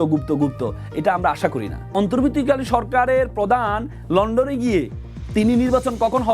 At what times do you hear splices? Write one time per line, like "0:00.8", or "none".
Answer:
0:01.9

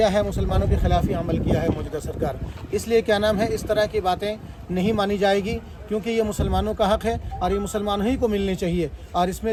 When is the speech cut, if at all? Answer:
none

